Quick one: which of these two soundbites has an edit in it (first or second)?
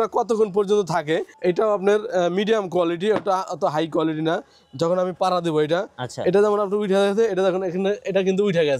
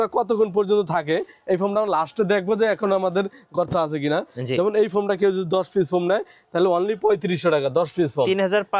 first